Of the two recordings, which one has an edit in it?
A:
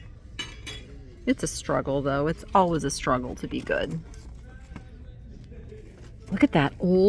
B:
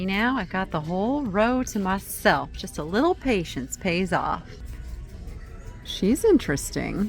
B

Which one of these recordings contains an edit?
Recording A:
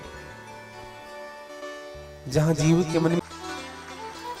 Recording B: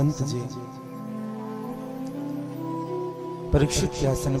A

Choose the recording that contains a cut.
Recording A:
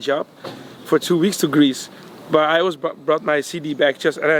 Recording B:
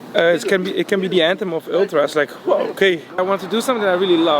B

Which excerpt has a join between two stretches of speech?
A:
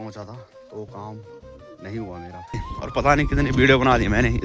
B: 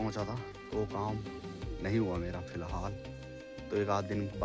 A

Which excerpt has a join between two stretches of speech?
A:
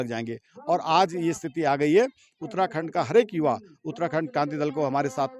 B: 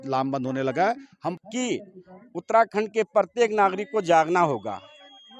B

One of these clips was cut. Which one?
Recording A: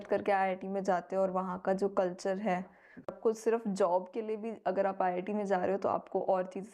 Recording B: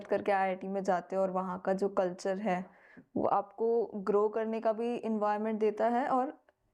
A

